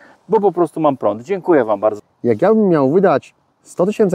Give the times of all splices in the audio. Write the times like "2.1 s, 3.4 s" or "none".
2.0 s